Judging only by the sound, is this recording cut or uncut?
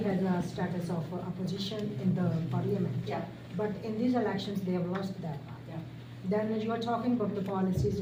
uncut